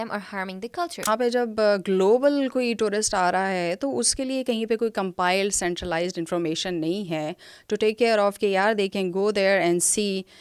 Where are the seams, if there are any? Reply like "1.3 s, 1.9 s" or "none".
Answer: 1.0 s